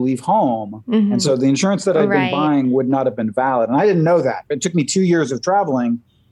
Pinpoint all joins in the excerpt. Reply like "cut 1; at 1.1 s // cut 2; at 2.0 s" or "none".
cut 1; at 1.2 s

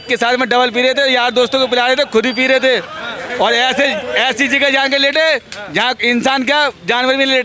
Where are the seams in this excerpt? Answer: none

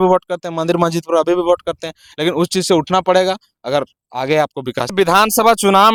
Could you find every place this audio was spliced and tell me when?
none

